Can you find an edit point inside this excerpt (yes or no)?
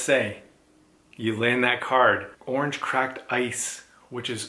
yes